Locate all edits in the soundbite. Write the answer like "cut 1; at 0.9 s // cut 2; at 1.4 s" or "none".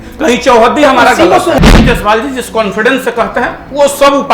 cut 1; at 1.6 s